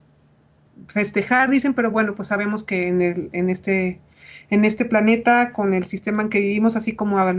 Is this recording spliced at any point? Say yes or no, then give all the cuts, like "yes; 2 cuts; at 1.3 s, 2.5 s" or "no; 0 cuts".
yes; 1 cut; at 2.1 s